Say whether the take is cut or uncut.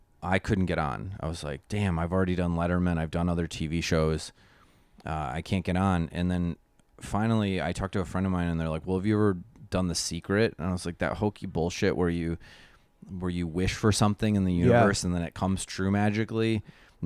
uncut